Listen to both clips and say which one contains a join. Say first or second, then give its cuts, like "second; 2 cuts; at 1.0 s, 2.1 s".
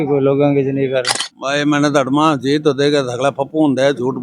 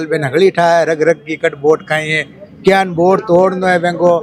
first; 1 cut; at 1.2 s